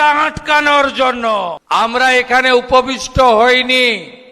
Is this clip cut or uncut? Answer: cut